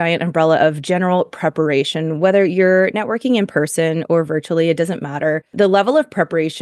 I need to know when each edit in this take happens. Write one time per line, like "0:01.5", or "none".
0:05.5